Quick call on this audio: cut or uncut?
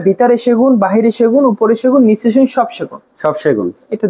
uncut